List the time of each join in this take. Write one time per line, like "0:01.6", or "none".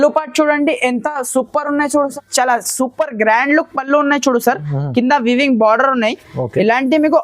0:02.1